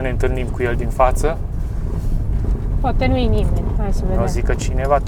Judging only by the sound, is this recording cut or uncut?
uncut